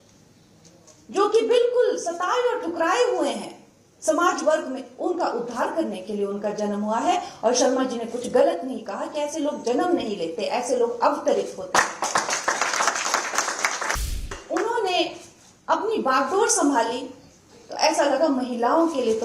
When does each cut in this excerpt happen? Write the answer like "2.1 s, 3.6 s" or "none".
14.3 s